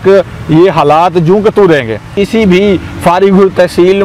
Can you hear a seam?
yes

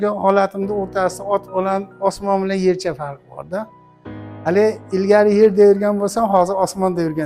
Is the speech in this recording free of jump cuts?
yes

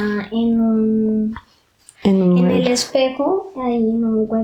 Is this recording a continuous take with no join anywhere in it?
yes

